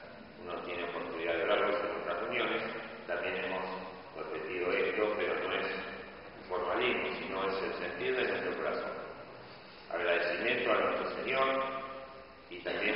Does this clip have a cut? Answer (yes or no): yes